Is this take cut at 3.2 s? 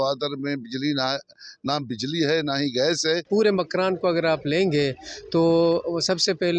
yes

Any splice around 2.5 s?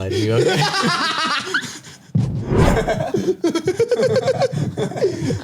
yes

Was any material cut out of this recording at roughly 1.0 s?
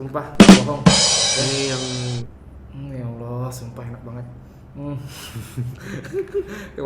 no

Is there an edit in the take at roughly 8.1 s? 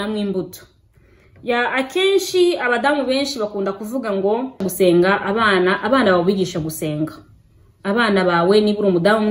no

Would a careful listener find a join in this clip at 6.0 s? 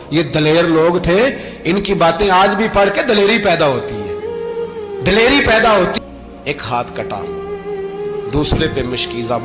yes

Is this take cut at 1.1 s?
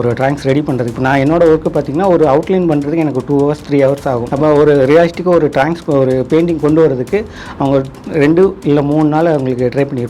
no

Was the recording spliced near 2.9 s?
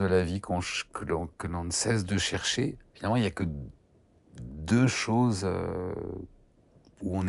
yes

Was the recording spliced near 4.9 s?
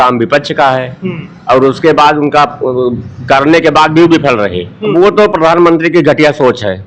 yes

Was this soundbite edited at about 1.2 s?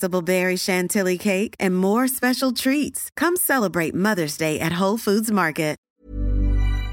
no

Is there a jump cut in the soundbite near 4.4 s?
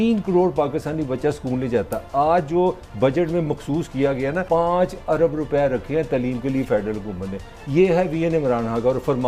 yes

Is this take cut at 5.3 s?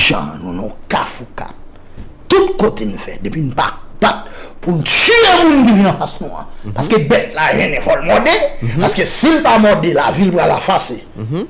yes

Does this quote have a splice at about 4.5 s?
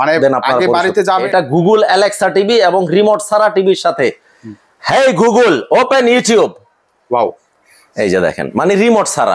no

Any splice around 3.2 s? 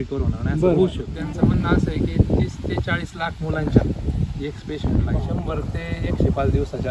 no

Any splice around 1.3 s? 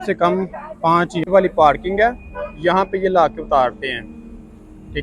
yes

